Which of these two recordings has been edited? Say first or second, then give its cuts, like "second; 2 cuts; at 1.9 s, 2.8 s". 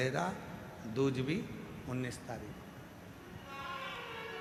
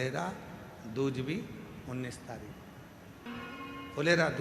second; 1 cut; at 3.3 s